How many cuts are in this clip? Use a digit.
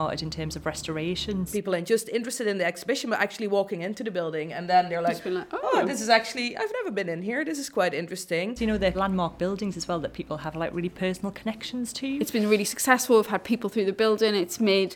3